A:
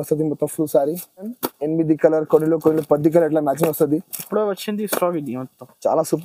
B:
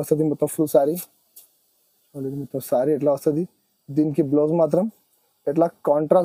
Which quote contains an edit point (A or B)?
A